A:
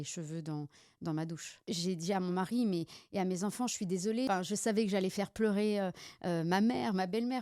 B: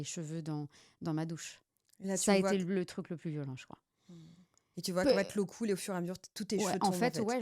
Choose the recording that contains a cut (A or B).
A